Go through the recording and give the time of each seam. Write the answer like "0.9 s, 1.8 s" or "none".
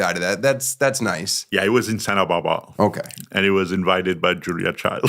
1.3 s